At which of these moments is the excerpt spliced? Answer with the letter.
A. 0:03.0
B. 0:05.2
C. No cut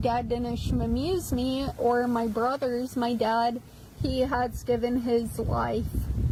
C